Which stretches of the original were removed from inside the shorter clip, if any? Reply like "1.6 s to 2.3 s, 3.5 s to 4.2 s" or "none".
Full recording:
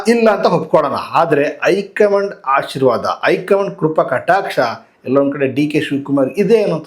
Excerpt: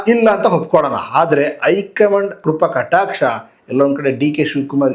2.4 s to 3.7 s

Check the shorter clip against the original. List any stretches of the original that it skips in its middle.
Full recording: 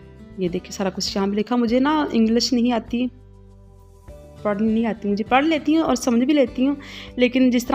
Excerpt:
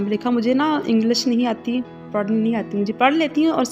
3.2 s to 4.3 s

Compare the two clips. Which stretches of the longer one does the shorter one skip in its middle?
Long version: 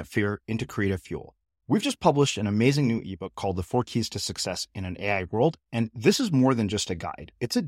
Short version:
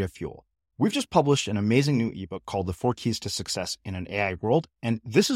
none

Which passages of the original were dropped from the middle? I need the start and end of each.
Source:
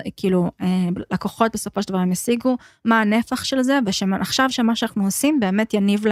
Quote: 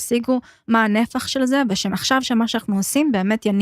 4.1 s to 4.2 s

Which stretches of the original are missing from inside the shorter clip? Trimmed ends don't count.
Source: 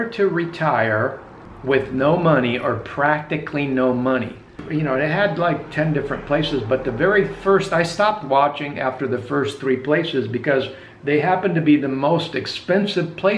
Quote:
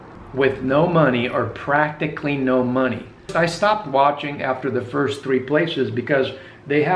4.6 s to 7.7 s

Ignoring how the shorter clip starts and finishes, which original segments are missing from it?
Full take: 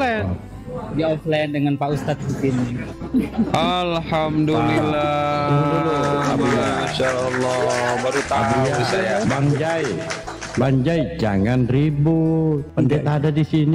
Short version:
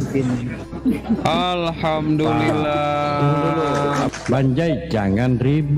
6.4 s to 10.4 s

